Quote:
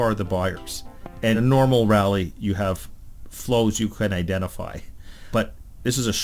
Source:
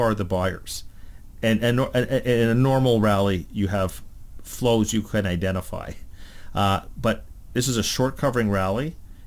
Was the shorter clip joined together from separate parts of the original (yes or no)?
yes